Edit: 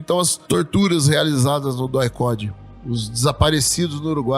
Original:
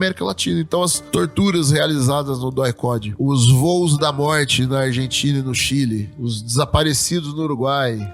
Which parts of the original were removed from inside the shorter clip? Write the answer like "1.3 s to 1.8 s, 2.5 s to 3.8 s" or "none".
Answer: 3.2 s to 5.9 s